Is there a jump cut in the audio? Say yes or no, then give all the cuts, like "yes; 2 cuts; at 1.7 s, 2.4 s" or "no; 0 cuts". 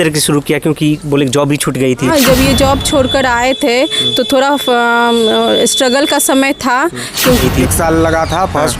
yes; 2 cuts; at 2.1 s, 7.4 s